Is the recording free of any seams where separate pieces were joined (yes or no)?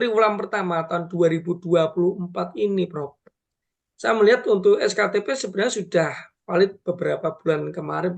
yes